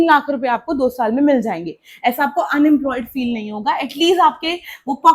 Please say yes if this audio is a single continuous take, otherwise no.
yes